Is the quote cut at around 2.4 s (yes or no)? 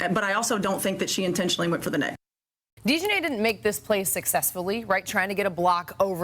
yes